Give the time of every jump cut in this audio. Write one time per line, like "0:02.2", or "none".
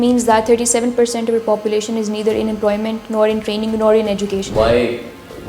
0:04.5